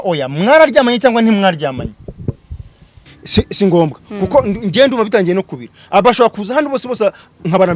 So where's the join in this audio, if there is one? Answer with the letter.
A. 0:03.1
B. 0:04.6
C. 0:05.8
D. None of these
A